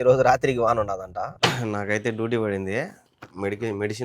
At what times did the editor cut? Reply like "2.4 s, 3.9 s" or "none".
1.3 s